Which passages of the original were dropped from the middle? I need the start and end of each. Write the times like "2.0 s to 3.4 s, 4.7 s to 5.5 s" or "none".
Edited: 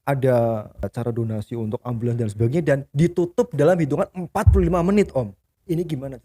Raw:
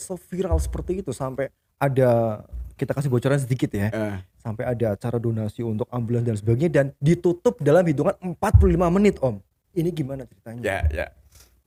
2.6 s to 5.0 s